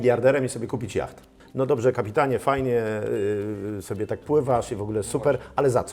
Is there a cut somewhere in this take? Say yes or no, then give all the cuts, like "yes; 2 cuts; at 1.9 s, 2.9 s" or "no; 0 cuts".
yes; 1 cut; at 1.3 s